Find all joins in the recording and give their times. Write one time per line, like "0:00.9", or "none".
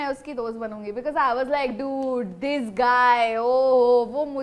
none